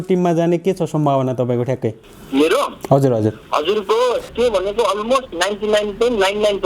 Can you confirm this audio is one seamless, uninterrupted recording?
no; 1 cut; at 4.3 s

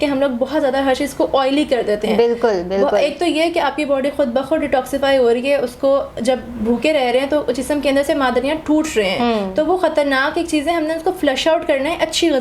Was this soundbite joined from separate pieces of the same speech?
no; 0 cuts

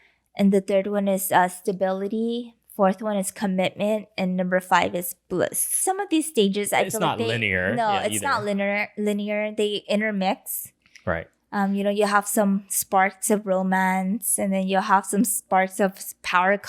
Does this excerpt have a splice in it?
yes; 1 cut; at 5.7 s

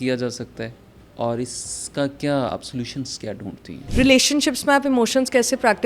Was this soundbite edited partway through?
yes; 1 cut; at 3.8 s

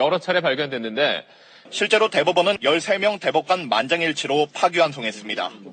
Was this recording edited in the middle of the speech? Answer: no; 0 cuts

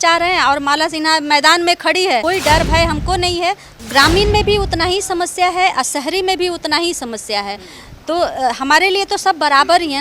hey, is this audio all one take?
no; 2 cuts; at 2.2 s, 3.7 s

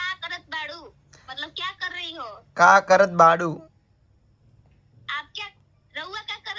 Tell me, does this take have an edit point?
no; 0 cuts

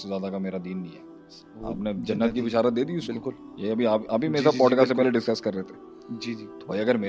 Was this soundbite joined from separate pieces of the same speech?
no; 0 cuts

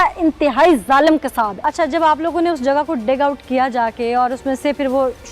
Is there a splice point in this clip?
yes; 1 cut; at 1.6 s

